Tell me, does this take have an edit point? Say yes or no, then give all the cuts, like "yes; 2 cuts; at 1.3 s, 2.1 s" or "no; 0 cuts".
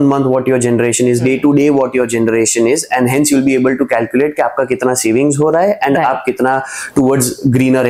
no; 0 cuts